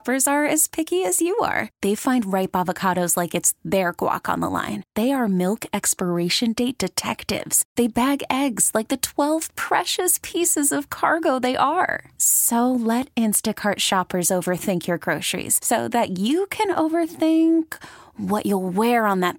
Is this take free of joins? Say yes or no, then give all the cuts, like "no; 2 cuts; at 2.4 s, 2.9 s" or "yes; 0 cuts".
yes; 0 cuts